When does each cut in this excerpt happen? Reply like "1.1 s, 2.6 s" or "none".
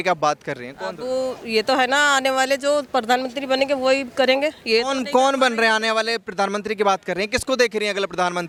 none